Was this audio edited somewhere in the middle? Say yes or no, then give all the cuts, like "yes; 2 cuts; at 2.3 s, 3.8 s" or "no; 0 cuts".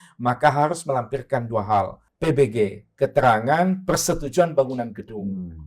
yes; 1 cut; at 2.0 s